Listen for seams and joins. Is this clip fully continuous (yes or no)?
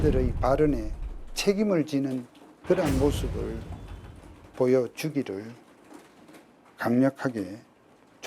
yes